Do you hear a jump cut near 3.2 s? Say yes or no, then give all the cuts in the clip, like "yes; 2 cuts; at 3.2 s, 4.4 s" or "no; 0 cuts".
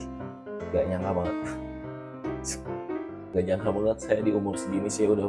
yes; 1 cut; at 3.2 s